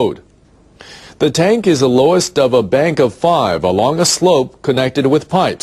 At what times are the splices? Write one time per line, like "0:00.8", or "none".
none